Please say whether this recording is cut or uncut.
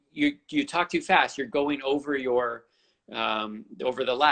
uncut